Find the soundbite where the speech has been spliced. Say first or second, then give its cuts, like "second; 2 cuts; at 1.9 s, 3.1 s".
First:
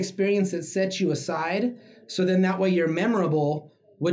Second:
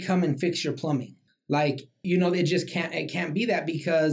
second; 1 cut; at 1.7 s